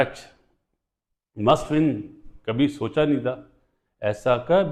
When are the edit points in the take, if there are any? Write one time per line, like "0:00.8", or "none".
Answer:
none